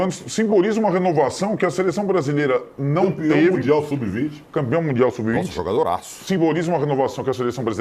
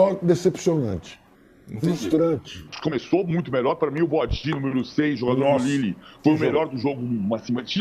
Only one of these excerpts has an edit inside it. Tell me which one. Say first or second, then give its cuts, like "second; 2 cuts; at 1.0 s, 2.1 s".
second; 1 cut; at 2.7 s